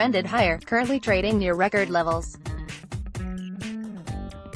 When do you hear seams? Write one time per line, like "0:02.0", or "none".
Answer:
0:02.3
0:03.5